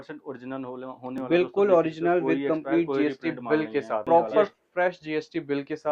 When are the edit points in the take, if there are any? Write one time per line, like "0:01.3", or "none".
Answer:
0:04.0